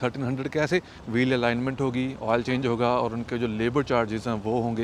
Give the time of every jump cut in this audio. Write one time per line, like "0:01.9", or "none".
0:01.0